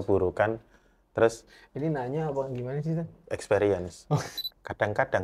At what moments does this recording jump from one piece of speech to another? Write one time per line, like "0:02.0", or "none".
0:04.3